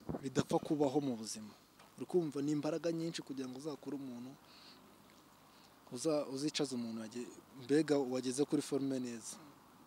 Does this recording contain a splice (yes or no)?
yes